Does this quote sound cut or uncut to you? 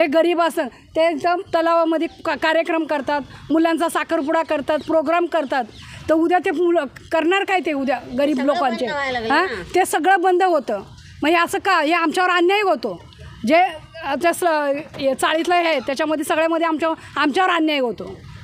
uncut